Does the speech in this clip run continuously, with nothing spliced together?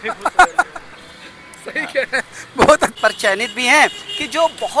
no; 1 cut; at 3.0 s

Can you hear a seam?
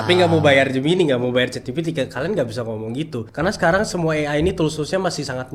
no; 0 cuts

